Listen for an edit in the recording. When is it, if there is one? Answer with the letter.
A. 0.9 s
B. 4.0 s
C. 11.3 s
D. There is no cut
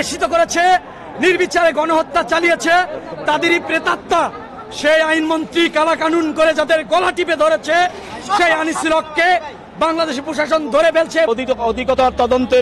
C